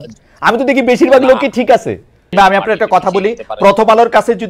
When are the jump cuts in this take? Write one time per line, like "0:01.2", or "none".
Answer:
0:02.3